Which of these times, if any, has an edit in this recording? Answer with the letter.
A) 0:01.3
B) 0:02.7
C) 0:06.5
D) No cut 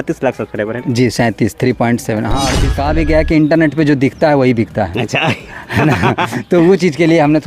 B